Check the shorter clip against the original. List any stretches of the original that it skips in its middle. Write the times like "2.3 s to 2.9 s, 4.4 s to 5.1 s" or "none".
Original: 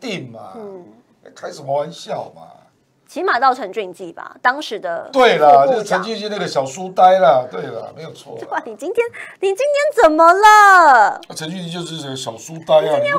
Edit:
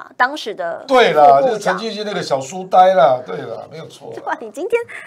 none